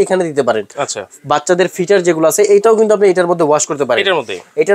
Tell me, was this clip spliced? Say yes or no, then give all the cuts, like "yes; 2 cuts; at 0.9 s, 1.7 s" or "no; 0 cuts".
no; 0 cuts